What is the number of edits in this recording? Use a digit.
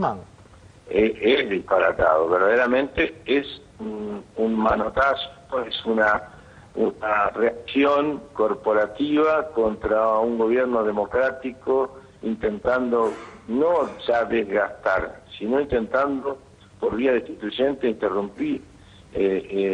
0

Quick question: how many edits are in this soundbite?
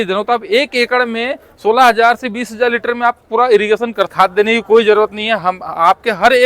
1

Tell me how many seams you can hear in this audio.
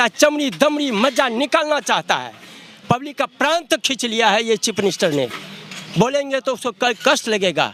0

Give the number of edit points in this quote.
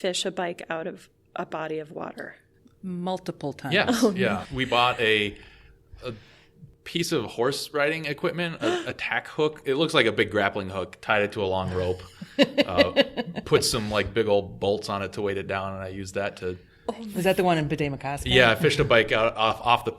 1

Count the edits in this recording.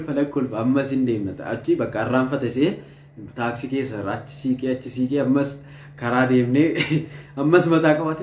0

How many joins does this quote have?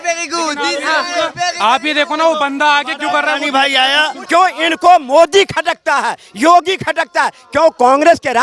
1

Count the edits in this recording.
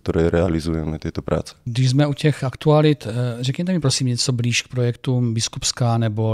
0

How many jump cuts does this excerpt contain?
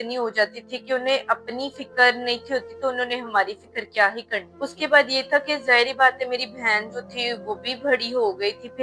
1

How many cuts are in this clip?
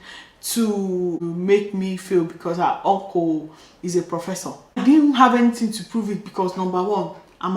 2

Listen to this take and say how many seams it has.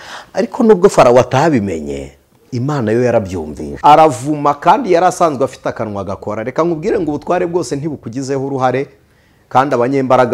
1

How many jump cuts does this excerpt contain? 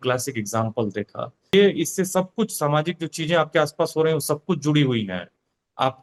1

